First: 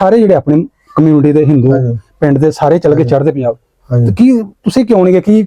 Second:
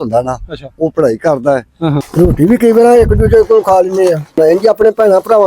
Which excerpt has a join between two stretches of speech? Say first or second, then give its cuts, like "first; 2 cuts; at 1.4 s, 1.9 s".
second; 2 cuts; at 2.1 s, 4.3 s